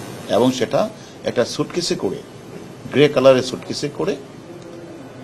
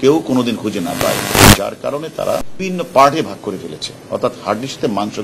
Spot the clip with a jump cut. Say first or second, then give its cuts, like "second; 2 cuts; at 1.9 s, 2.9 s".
second; 1 cut; at 2.4 s